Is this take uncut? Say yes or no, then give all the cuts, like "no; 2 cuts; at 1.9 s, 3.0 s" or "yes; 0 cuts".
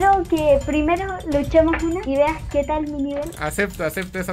no; 2 cuts; at 2.0 s, 3.3 s